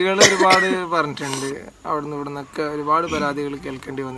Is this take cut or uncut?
uncut